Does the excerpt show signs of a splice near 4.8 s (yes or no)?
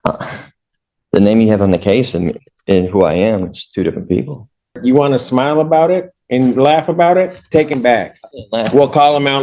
yes